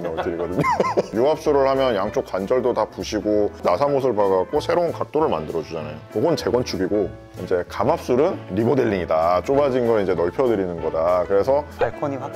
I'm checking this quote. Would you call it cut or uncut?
cut